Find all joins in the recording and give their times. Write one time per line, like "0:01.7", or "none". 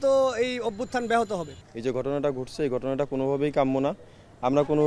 0:01.7